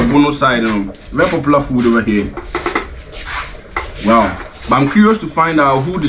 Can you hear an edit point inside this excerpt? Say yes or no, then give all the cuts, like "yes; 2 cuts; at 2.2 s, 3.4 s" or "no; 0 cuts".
no; 0 cuts